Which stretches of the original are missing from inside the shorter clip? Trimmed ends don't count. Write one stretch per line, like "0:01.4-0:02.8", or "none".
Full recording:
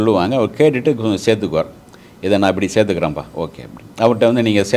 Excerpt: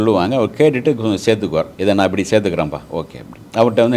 0:01.7-0:02.2